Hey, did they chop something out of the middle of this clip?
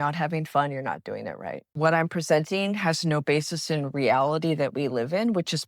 yes; 1 cut; at 1.7 s

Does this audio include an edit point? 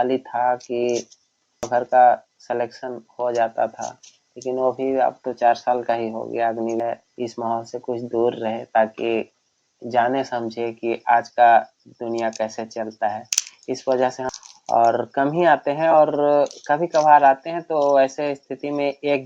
yes; 3 cuts; at 1.7 s, 6.8 s, 14.2 s

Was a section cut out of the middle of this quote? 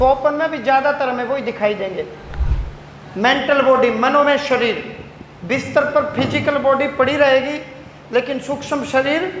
no; 0 cuts

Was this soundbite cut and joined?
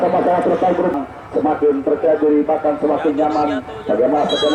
yes; 1 cut; at 0.9 s

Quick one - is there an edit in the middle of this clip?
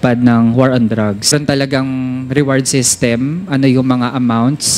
yes; 1 cut; at 1.2 s

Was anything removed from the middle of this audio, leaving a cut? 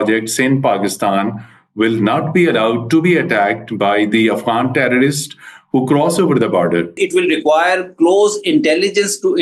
yes; 1 cut; at 7.0 s

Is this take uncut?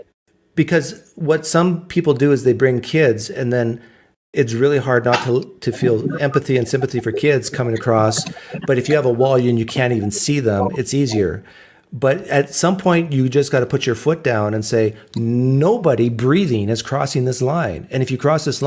no; 1 cut; at 11.4 s

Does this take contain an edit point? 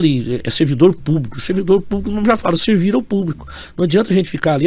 no; 0 cuts

